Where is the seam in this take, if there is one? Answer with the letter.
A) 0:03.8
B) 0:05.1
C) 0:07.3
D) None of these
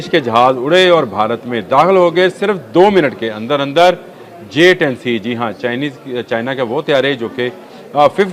D